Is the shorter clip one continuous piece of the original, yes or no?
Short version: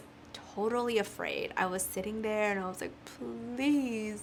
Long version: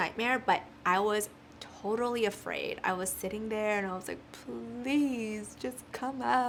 yes